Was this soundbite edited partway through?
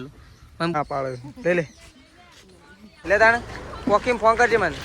yes; 2 cuts; at 0.7 s, 2.9 s

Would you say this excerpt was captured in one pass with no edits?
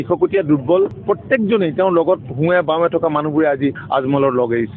no; 1 cut; at 1.0 s

